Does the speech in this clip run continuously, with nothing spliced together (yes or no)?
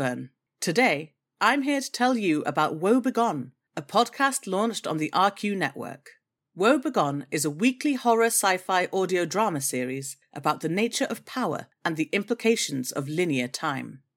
yes